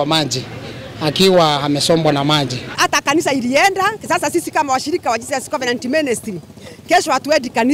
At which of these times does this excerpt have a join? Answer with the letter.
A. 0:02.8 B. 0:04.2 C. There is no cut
A